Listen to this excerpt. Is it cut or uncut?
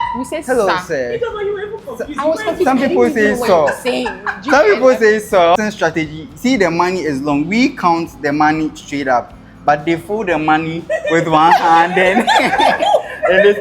cut